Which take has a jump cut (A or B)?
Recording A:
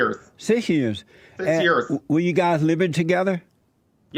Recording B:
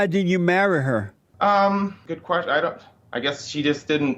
B